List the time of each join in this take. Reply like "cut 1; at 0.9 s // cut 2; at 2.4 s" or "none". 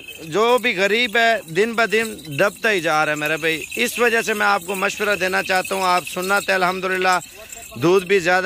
none

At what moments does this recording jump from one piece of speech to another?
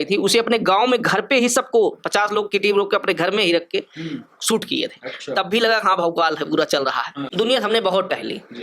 cut 1; at 7.3 s

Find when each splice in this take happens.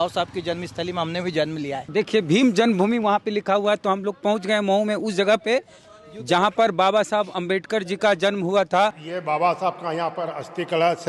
cut 1; at 1.9 s // cut 2; at 9.1 s

